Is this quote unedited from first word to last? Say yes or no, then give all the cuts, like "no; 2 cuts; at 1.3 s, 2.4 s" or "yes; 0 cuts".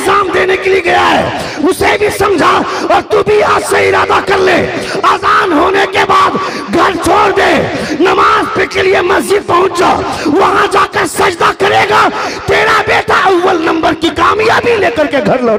yes; 0 cuts